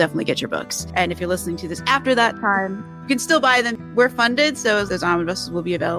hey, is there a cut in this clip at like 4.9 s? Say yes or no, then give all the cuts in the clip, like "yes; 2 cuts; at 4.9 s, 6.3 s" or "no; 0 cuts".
yes; 1 cut; at 4.9 s